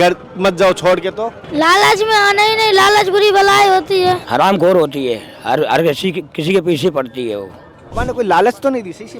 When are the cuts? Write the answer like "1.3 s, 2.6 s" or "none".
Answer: 4.2 s, 8.0 s